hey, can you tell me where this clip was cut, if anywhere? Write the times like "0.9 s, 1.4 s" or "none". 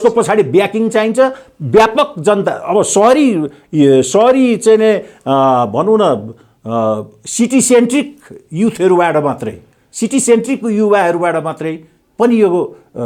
none